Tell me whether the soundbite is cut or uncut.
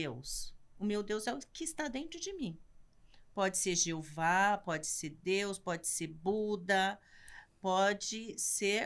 uncut